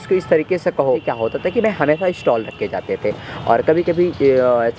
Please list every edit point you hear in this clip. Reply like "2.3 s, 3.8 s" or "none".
1.1 s